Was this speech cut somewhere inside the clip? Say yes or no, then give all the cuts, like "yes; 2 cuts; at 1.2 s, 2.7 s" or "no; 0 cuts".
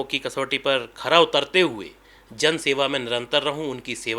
no; 0 cuts